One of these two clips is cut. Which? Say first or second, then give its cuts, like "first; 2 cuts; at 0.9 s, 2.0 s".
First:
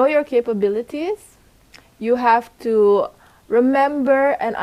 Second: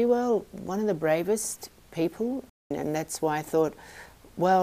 second; 1 cut; at 2.7 s